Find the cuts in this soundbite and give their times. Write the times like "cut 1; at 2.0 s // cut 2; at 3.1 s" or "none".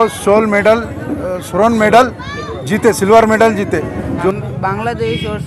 cut 1; at 4.3 s